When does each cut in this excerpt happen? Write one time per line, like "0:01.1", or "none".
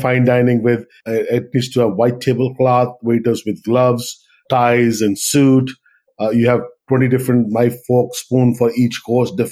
0:00.9
0:04.4
0:06.1